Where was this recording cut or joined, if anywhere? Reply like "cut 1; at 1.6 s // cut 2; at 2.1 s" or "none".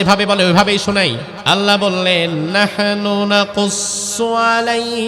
cut 1; at 1.3 s